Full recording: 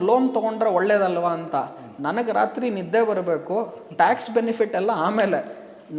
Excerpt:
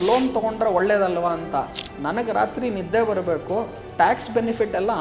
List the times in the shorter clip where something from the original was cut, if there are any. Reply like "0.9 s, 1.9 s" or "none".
none